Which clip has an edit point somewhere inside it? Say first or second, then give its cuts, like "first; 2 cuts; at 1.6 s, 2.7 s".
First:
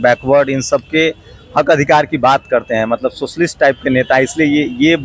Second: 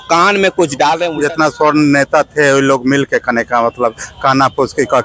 second; 1 cut; at 1.1 s